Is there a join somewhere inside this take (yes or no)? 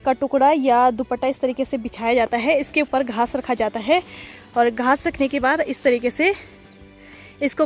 no